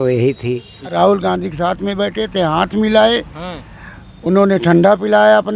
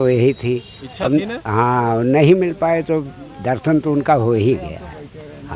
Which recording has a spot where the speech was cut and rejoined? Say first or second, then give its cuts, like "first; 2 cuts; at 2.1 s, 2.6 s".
first; 1 cut; at 0.9 s